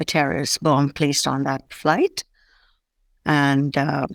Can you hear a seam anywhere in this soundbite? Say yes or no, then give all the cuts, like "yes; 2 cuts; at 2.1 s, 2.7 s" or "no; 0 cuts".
no; 0 cuts